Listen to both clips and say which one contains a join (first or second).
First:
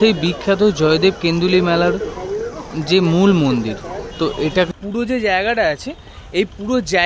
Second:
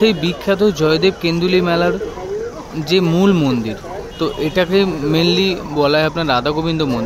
first